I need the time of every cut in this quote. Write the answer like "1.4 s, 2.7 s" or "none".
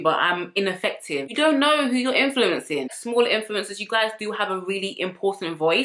1.3 s, 3.0 s